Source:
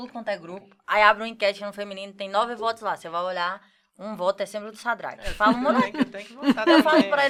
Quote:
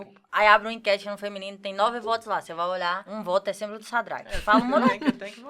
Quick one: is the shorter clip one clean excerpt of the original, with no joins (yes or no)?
no